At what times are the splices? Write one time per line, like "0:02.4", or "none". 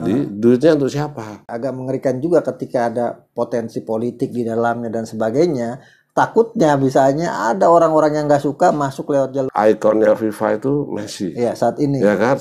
0:01.5
0:09.4